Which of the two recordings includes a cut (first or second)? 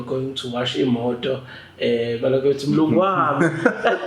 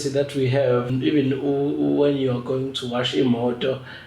second